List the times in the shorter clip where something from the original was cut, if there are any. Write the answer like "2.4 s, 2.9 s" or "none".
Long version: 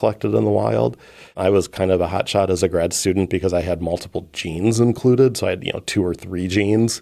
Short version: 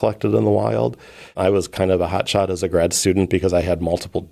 none